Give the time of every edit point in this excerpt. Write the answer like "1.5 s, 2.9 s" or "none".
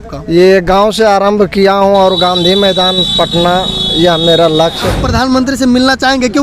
4.9 s